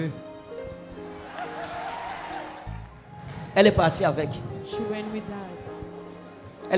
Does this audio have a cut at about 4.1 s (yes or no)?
no